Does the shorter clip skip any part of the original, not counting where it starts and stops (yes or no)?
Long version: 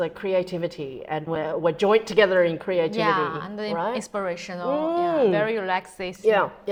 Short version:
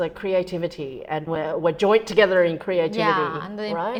no